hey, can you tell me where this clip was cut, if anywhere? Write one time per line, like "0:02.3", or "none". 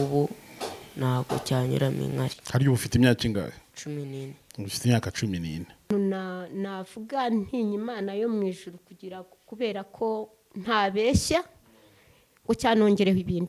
0:05.9